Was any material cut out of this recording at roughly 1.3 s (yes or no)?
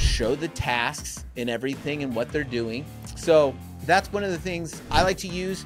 no